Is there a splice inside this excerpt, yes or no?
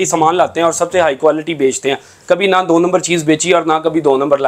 no